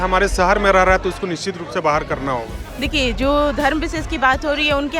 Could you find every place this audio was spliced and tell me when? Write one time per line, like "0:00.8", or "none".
0:02.6